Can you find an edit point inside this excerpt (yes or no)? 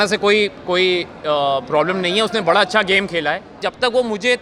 yes